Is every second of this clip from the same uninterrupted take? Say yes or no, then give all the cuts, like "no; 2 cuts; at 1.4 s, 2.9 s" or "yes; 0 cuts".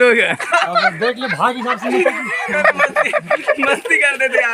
yes; 0 cuts